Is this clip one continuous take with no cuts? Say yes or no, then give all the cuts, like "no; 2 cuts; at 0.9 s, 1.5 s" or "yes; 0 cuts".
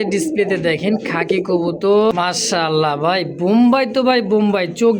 no; 1 cut; at 2.1 s